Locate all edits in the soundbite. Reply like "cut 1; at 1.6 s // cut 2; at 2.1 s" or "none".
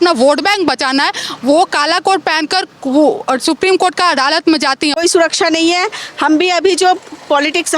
cut 1; at 4.9 s